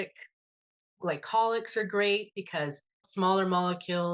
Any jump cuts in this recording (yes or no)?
yes